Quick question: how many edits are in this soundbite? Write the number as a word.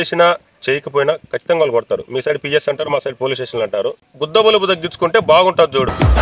zero